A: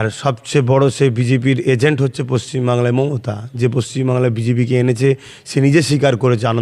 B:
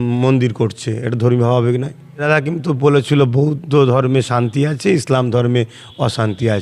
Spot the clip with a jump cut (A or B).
B